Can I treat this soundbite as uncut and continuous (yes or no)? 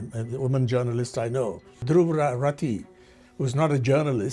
no